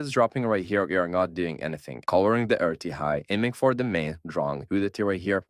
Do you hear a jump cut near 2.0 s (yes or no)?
yes